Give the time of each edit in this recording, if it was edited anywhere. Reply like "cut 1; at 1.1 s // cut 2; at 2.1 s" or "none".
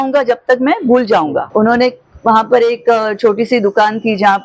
cut 1; at 1.5 s